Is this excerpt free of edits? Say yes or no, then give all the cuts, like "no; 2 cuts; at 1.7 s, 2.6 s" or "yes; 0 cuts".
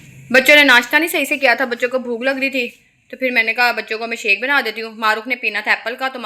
yes; 0 cuts